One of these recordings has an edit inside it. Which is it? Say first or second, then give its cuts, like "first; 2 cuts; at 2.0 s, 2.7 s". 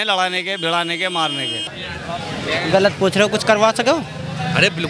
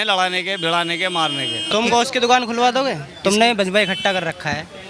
second; 1 cut; at 1.7 s